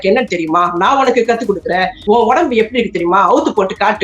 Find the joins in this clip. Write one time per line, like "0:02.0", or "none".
0:01.9